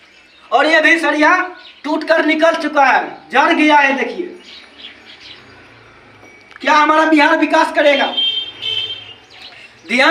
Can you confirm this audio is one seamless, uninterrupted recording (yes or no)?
yes